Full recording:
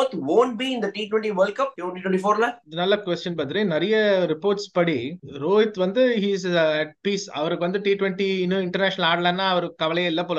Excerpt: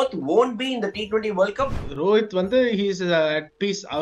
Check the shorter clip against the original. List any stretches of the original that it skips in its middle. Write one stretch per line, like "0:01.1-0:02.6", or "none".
0:01.8-0:05.3